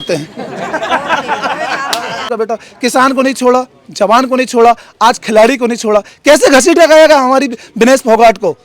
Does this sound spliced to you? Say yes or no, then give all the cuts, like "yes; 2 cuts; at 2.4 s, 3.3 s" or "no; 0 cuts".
yes; 1 cut; at 2.3 s